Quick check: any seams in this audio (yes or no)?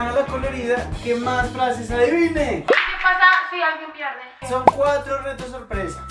yes